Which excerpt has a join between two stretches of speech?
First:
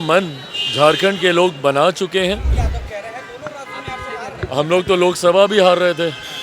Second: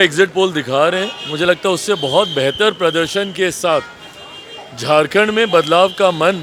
first; 1 cut; at 2.5 s

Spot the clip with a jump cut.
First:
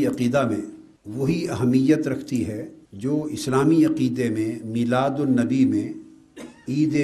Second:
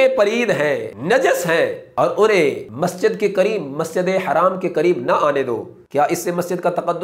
second; 4 cuts; at 0.9 s, 1.8 s, 2.7 s, 5.7 s

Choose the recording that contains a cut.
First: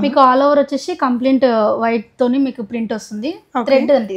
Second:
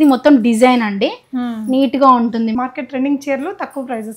second; 1 cut; at 2.5 s

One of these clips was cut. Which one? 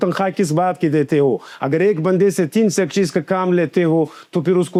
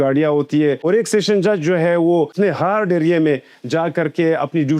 second; 2 cuts; at 0.8 s, 2.3 s

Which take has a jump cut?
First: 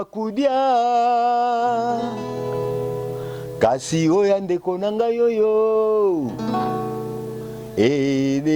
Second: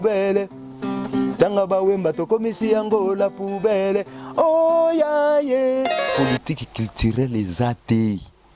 second; 1 cut; at 6.1 s

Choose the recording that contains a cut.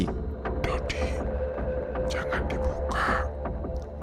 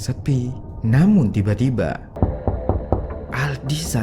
second; 1 cut; at 2.1 s

